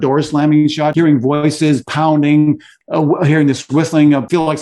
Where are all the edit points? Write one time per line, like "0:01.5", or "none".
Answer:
0:00.9
0:02.8

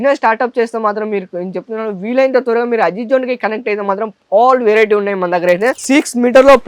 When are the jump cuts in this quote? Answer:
0:05.8

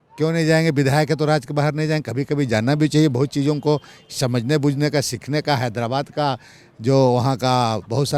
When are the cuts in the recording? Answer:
none

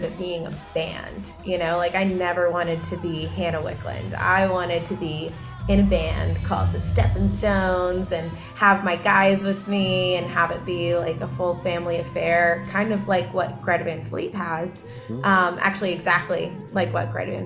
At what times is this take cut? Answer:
none

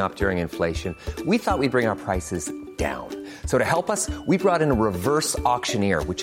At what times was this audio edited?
none

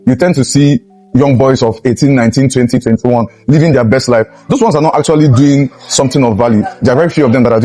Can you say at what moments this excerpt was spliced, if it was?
none

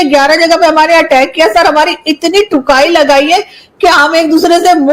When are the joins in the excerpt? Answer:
none

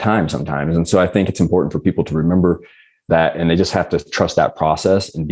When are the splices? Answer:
none

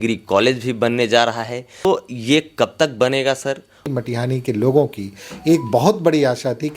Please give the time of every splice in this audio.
0:01.8
0:03.8

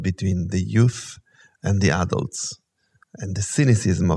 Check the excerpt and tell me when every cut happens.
none

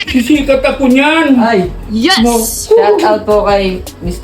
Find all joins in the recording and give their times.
0:02.5

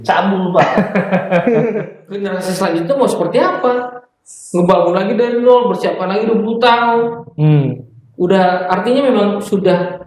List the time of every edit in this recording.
0:01.9

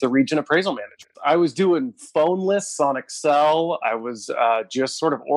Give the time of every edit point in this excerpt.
0:01.1

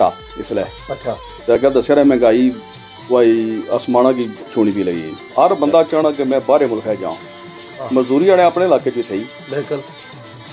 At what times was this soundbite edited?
0:05.1

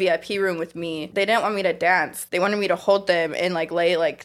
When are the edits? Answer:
0:01.0
0:02.2

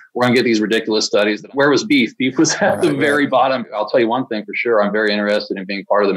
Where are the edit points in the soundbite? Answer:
0:01.4
0:03.8

